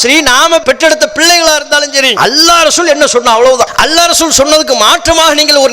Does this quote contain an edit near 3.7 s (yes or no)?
yes